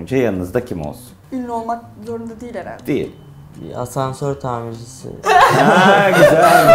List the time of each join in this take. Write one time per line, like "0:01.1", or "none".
0:01.1